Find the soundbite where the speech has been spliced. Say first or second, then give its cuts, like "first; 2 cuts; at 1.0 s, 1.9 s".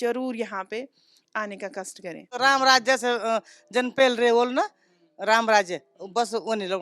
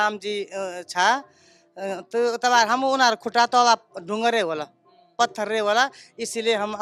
first; 1 cut; at 2.2 s